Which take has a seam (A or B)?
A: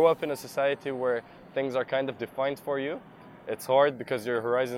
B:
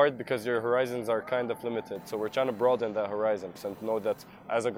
B